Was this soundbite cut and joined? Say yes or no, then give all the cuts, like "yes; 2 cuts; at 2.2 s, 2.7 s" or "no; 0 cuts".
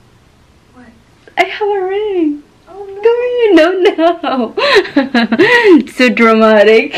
no; 0 cuts